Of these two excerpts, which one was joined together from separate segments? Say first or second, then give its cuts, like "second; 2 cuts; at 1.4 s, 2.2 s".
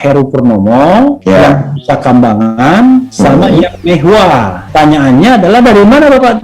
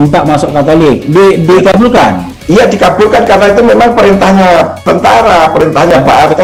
first; 1 cut; at 4.6 s